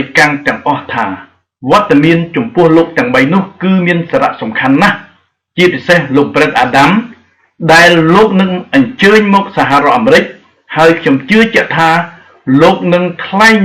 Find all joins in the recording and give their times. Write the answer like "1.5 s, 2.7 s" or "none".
none